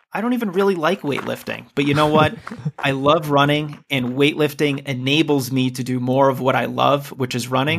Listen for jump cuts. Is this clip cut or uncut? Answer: uncut